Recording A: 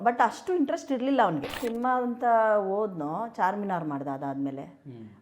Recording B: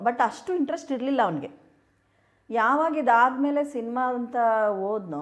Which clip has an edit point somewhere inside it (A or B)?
A